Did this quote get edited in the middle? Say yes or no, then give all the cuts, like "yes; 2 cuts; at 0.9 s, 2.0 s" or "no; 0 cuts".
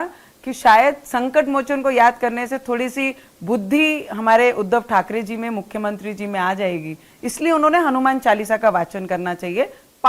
no; 0 cuts